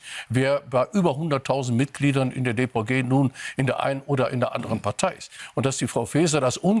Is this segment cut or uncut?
cut